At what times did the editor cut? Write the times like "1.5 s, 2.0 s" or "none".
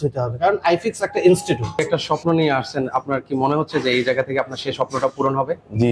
2.0 s